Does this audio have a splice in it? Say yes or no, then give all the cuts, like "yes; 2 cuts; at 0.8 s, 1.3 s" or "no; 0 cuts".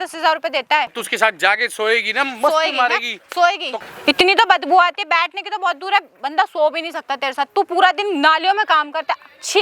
yes; 2 cuts; at 1.0 s, 3.8 s